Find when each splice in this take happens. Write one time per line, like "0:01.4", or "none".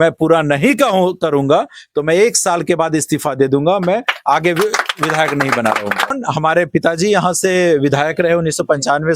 0:06.2